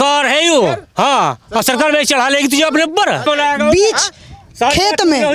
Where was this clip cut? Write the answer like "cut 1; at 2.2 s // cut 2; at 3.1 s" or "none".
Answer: cut 1; at 3.2 s